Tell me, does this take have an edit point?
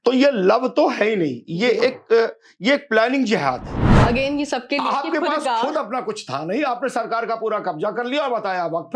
yes; 1 cut; at 3.9 s

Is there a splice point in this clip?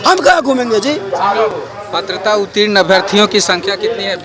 no; 0 cuts

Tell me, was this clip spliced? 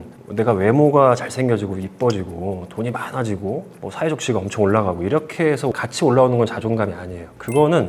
no; 0 cuts

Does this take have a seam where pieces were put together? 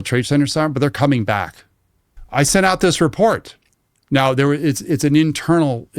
yes; 1 cut; at 2.2 s

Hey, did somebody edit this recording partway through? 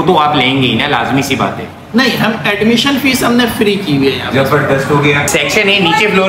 yes; 1 cut; at 5.2 s

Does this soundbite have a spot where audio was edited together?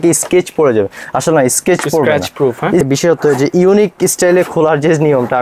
yes; 1 cut; at 2.9 s

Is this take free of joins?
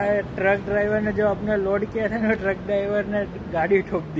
yes; 0 cuts

